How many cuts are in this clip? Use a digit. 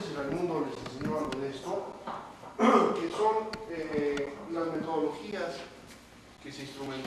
1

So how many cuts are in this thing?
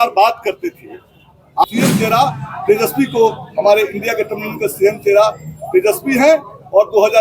1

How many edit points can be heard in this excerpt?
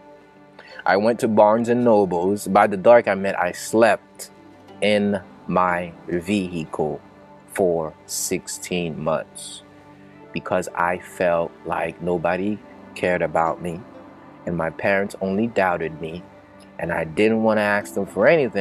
0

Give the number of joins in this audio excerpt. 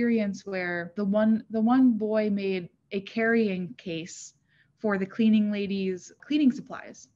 2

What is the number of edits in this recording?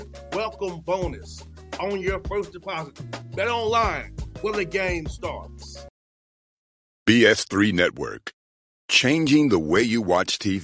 1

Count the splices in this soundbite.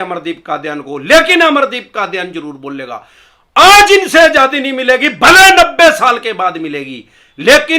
0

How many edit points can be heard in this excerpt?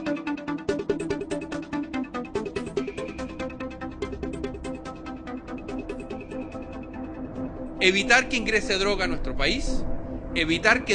1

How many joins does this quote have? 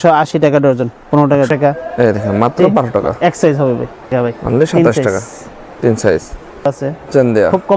3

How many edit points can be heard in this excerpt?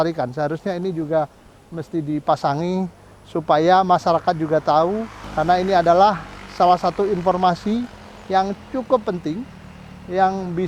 1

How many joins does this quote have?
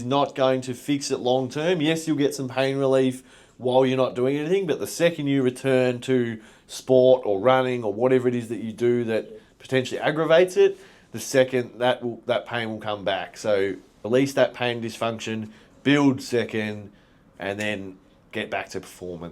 1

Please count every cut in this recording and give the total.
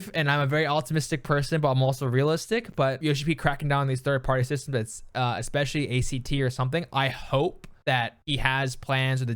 2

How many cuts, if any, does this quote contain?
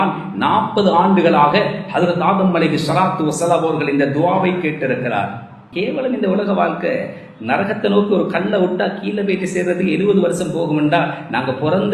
1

